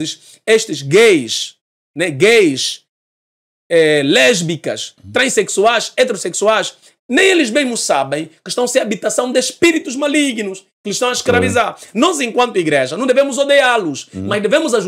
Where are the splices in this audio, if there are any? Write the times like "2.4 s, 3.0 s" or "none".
none